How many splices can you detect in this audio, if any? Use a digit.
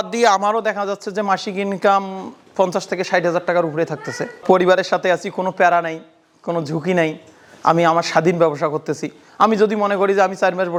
0